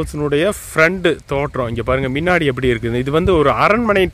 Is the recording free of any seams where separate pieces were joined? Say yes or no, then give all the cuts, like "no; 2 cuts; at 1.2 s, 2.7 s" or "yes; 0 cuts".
yes; 0 cuts